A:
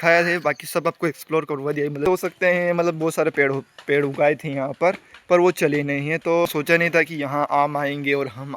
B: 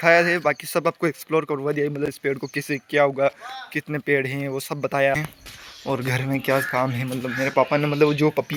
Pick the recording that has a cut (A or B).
A